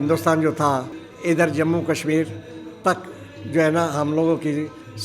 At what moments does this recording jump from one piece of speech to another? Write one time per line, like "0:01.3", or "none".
0:01.0